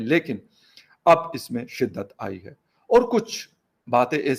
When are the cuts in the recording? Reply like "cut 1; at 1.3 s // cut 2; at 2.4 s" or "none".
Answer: none